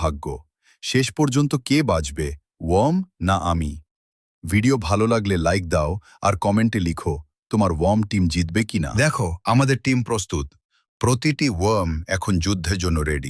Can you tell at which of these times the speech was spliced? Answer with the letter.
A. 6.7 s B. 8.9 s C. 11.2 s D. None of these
B